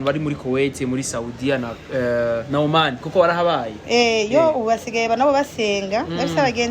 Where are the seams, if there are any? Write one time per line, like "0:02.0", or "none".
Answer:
none